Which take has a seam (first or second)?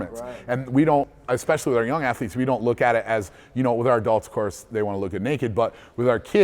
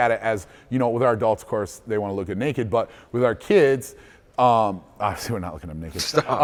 first